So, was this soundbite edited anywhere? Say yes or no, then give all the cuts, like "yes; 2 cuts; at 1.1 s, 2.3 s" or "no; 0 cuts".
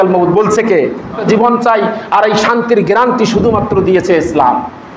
yes; 1 cut; at 1.2 s